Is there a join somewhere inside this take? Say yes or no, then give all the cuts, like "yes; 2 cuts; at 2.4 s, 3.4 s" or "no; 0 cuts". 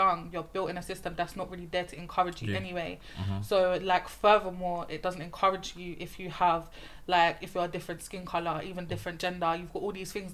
no; 0 cuts